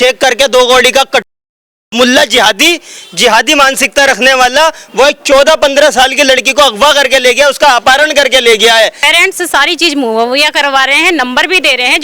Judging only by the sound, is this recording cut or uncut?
cut